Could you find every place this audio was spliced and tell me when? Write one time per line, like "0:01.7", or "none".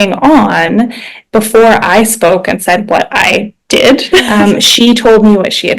0:04.3